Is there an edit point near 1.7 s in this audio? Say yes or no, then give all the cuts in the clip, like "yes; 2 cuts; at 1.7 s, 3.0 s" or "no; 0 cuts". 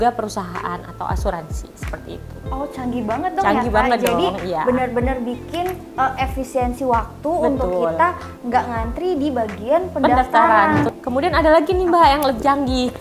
no; 1 cut; at 10.9 s